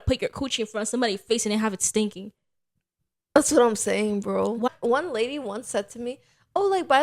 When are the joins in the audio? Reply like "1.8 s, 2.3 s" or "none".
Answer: 4.7 s